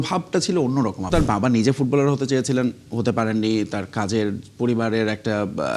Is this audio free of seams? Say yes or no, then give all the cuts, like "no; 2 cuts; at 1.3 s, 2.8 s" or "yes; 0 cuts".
no; 1 cut; at 1.1 s